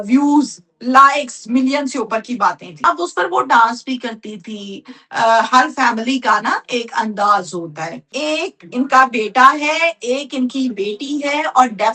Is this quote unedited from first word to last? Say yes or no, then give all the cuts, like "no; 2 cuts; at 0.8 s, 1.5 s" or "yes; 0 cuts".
no; 2 cuts; at 2.8 s, 8.1 s